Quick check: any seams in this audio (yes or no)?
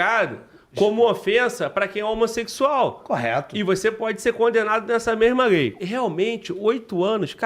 yes